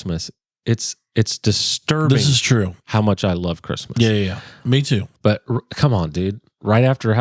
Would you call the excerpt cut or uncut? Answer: cut